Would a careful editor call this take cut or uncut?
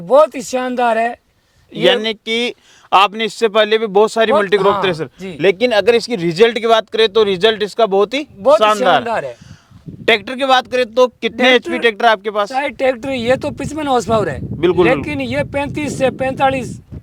uncut